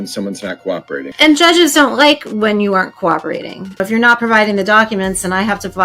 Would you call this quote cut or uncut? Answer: cut